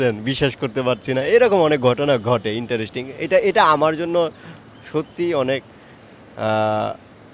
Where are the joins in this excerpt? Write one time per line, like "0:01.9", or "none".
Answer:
none